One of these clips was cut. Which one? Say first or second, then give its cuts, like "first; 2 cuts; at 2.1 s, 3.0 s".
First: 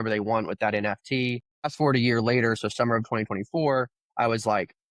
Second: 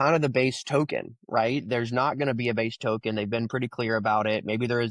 first; 1 cut; at 1.5 s